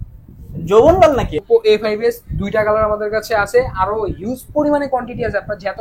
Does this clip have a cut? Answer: yes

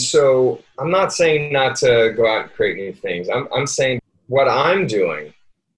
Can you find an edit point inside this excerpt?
yes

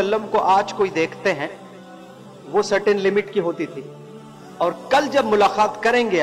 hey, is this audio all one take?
yes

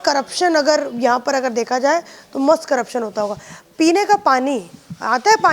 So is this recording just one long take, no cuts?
yes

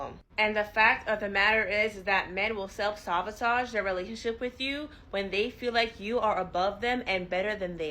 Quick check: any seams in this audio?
yes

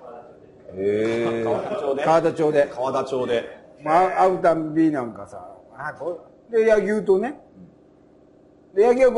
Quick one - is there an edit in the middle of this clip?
no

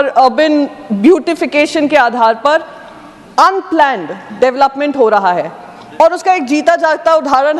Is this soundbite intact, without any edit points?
yes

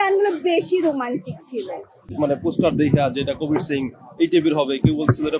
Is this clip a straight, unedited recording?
no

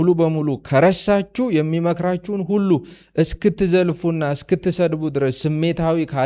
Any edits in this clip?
no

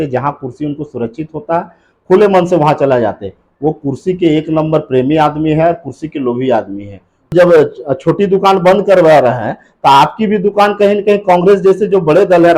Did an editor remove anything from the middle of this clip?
yes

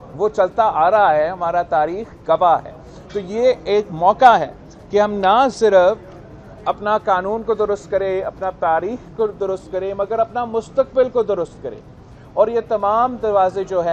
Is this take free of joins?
yes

